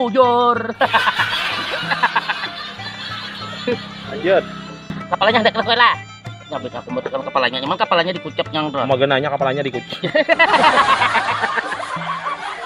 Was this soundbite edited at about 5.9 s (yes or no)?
no